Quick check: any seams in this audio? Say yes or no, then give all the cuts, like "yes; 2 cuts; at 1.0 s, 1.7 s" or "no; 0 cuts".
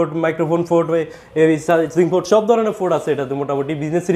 no; 0 cuts